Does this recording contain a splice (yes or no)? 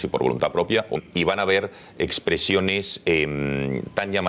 no